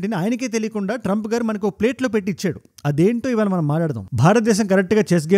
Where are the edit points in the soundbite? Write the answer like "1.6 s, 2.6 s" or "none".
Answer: 4.0 s

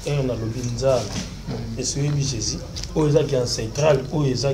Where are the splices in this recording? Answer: 2.7 s

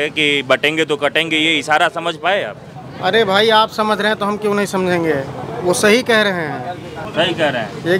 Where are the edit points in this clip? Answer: 5.4 s, 7.0 s

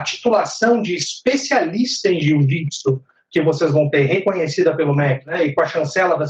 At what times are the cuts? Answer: 5.3 s

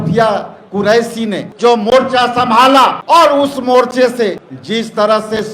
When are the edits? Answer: 1.5 s, 3.0 s, 4.5 s

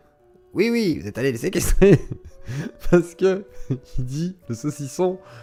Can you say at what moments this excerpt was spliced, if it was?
none

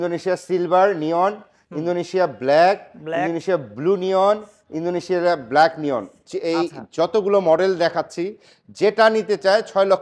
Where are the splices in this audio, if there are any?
none

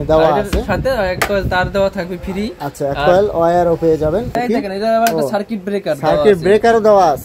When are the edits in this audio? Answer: 4.4 s

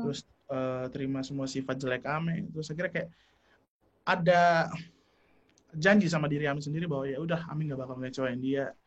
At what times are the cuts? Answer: none

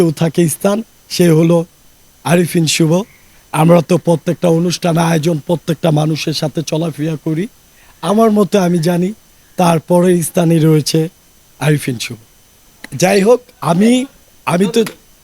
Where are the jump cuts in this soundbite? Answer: none

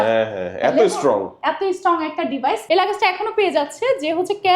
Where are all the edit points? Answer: 2.6 s

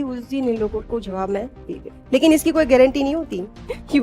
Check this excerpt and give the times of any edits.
1.9 s

